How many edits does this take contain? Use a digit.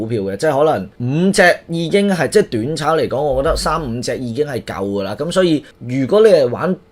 2